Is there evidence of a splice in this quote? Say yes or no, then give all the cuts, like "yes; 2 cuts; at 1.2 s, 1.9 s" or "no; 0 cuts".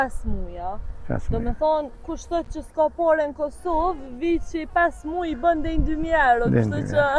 no; 0 cuts